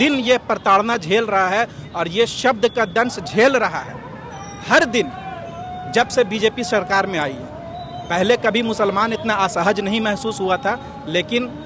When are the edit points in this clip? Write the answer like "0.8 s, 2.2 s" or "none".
none